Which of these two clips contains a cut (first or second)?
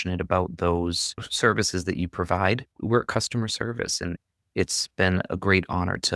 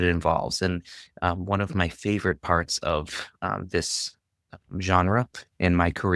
first